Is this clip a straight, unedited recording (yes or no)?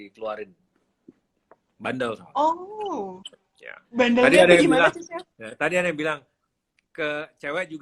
yes